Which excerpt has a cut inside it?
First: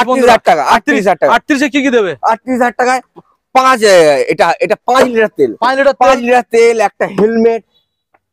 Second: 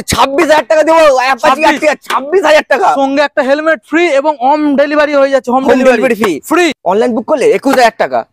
second; 1 cut; at 6.8 s

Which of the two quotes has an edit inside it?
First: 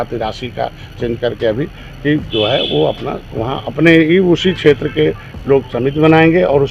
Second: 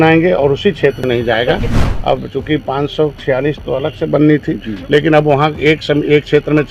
second; 1 cut; at 1.8 s

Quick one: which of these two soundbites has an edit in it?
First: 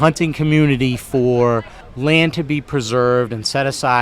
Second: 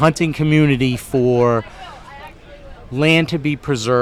first; 1 cut; at 1.8 s

